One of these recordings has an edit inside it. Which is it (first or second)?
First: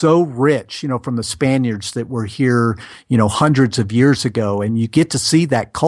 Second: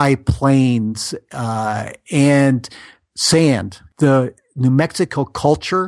second